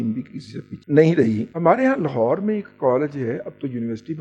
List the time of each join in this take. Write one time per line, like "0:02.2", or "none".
0:01.5